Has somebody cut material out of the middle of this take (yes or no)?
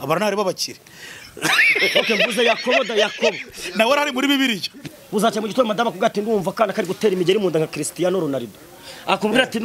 yes